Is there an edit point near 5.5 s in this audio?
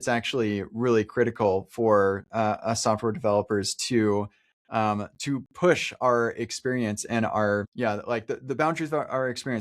no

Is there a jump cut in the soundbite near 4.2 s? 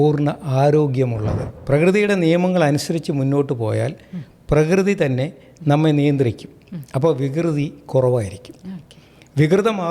no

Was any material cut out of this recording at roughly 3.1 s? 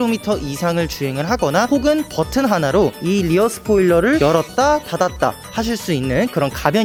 no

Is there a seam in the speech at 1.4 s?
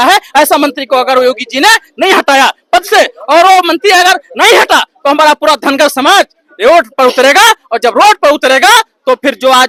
no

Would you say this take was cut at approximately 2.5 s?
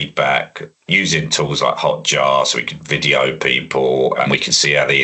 no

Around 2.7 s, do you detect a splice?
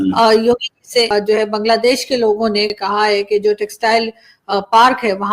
yes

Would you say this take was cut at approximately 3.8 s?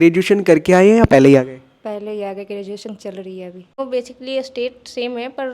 yes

